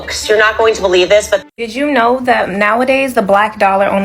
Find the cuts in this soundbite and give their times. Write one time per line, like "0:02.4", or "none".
0:01.6